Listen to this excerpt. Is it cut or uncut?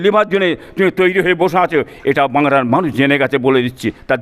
uncut